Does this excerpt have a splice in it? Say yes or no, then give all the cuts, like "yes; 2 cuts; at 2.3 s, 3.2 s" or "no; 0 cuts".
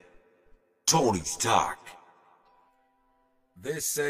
yes; 1 cut; at 2.5 s